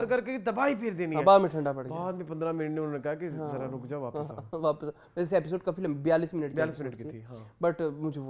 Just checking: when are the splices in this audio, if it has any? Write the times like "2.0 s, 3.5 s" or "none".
none